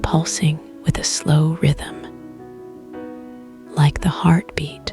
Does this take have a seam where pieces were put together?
no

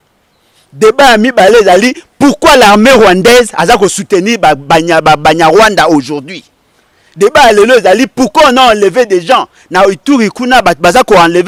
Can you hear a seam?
no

